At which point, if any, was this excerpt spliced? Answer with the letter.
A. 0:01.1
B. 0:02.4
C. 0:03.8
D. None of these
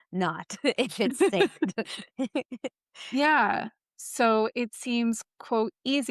C